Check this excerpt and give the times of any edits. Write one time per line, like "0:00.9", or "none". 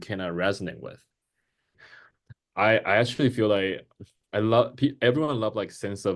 0:01.8